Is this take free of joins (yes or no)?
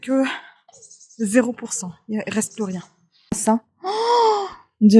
no